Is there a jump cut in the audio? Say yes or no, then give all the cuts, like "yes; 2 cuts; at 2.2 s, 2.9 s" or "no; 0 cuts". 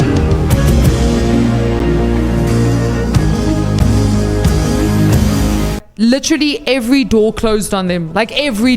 yes; 1 cut; at 5.8 s